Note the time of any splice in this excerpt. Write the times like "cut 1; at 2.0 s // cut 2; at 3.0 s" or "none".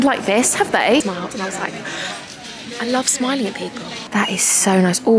cut 1; at 1.0 s // cut 2; at 3.9 s